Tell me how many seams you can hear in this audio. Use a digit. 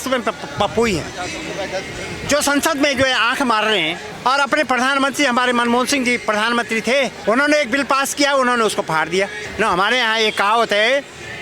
3